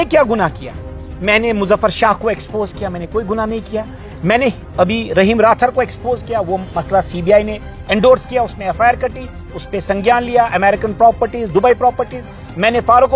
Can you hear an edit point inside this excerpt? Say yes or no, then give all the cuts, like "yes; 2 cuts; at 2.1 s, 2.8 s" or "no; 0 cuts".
no; 0 cuts